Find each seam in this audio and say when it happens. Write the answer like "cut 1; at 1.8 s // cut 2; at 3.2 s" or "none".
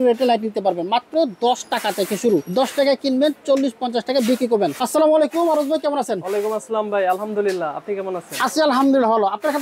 none